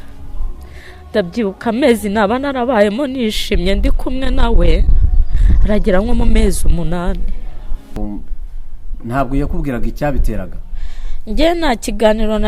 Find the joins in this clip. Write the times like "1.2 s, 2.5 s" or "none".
8.0 s